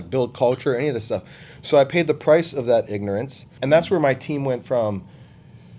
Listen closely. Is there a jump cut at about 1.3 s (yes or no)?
no